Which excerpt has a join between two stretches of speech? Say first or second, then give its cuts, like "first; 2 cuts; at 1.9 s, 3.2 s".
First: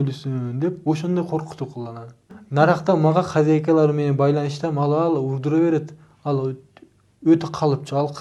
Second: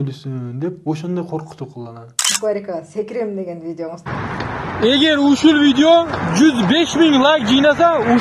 second; 2 cuts; at 2.3 s, 4.1 s